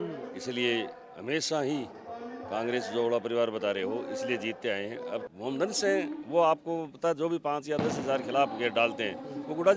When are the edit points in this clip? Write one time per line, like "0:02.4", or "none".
0:05.3